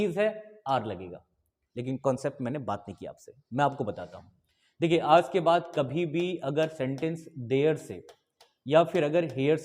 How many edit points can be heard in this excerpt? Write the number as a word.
zero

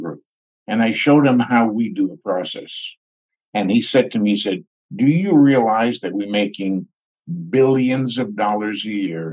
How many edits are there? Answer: zero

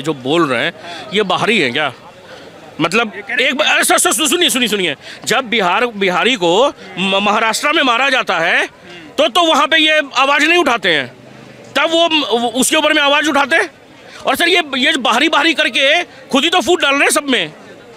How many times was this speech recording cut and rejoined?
zero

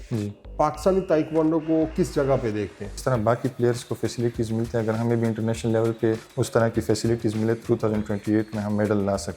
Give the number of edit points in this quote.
three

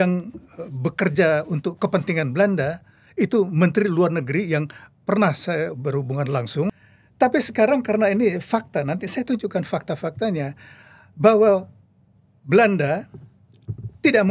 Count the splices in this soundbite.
one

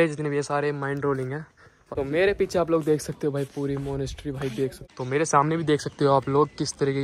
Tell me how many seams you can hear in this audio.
two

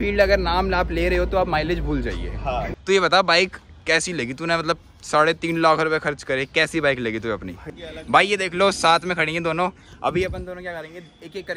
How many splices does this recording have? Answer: two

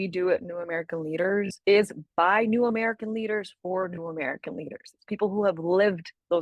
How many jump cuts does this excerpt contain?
one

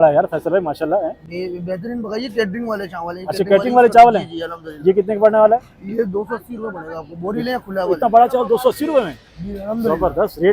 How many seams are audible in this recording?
zero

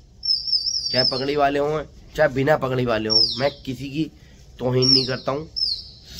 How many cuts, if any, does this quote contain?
zero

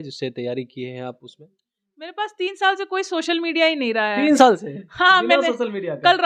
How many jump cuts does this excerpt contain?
zero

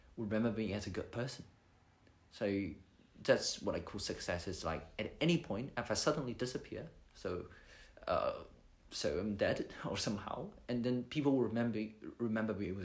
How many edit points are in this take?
zero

